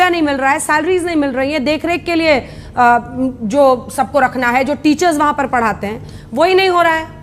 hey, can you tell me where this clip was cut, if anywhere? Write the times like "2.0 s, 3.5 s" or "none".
none